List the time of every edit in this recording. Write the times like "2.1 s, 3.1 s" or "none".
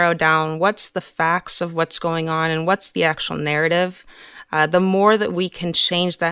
none

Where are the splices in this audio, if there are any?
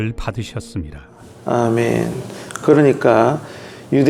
none

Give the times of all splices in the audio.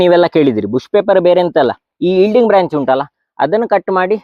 none

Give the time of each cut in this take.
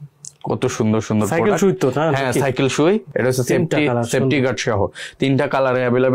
none

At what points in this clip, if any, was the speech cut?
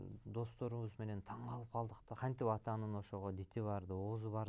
2.2 s

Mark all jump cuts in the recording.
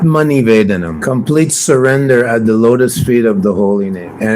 0.9 s

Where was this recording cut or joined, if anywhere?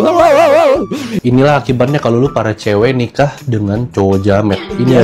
1.2 s

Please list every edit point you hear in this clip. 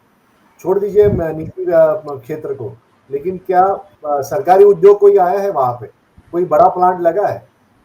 none

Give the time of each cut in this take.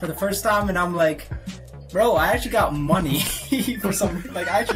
none

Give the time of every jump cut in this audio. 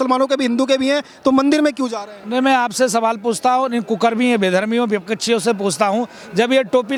none

